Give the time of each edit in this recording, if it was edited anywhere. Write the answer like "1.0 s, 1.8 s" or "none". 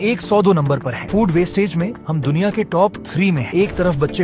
none